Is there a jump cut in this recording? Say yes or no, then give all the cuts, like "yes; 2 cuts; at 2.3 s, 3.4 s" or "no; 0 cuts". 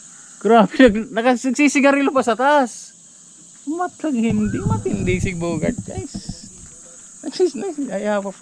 no; 0 cuts